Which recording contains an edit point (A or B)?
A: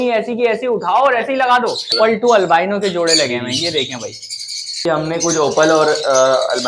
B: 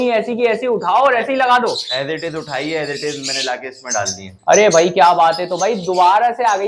A